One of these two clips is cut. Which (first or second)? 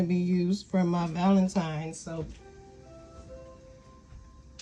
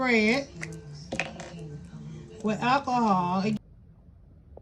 second